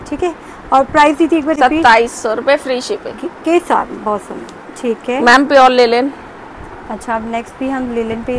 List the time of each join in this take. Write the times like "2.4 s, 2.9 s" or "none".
none